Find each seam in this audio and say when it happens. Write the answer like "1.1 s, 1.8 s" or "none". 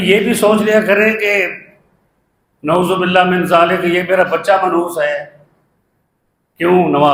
none